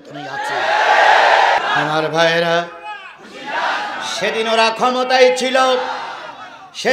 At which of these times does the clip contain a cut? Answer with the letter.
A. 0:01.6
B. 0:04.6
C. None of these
A